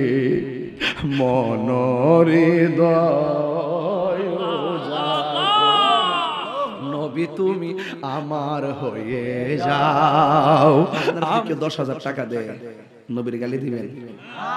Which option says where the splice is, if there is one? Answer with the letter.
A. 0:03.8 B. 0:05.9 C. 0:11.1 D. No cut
C